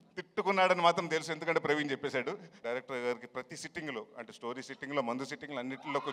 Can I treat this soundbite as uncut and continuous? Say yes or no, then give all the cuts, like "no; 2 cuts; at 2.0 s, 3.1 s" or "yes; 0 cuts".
no; 1 cut; at 2.5 s